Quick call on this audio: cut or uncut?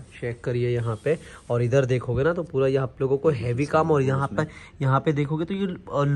uncut